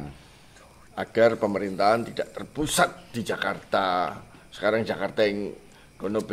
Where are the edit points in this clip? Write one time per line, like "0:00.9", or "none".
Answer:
none